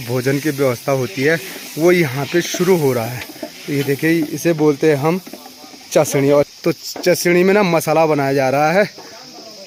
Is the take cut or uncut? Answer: uncut